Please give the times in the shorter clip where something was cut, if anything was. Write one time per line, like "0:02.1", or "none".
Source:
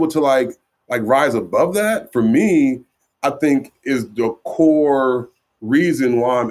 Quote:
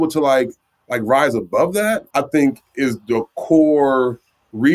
0:02.0

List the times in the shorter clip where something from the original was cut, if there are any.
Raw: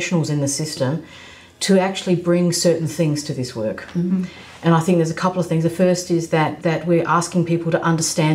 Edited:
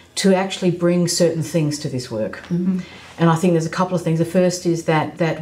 none

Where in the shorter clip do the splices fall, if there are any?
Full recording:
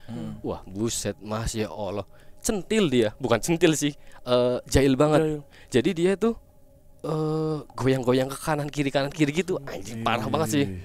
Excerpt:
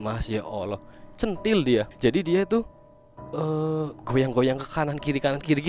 0:01.9

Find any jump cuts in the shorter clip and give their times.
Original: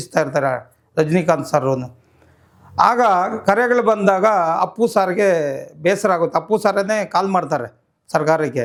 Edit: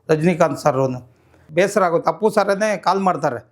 0:01.4

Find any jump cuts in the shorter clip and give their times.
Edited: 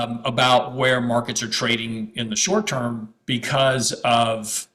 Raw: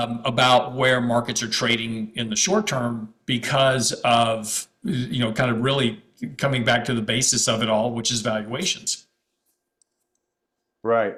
none

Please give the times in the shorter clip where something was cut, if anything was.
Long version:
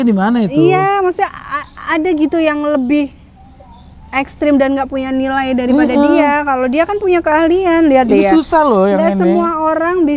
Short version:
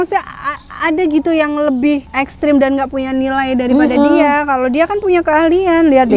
0:02.1

